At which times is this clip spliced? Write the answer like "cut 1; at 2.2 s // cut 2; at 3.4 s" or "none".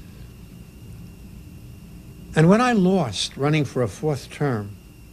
none

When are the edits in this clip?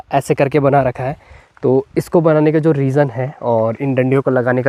none

